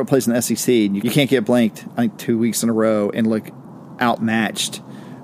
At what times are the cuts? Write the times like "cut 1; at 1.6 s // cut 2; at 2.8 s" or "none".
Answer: cut 1; at 1.0 s